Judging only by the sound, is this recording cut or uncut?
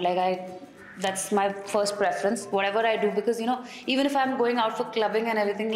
uncut